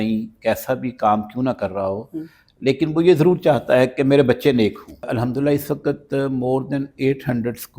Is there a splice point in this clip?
yes; 1 cut; at 5.0 s

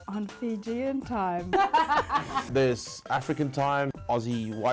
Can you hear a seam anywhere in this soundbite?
yes; 2 cuts; at 1.5 s, 2.5 s

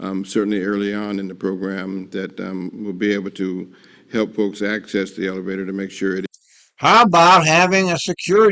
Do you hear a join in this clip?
no; 0 cuts

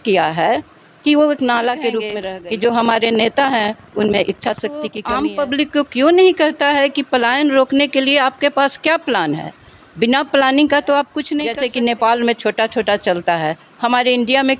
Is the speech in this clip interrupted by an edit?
yes; 3 cuts; at 2.2 s, 5.0 s, 11.4 s

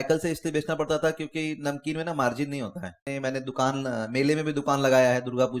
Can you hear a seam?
yes; 1 cut; at 3.1 s

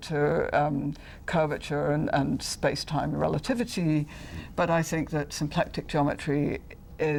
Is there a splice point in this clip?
no; 0 cuts

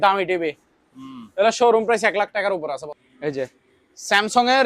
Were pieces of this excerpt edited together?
yes; 1 cut; at 2.9 s

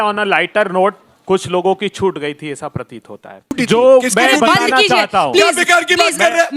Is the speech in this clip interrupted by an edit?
yes; 1 cut; at 3.6 s

